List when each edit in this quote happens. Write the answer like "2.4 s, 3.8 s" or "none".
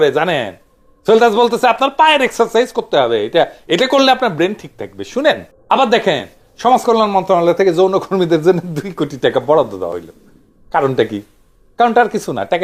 5.5 s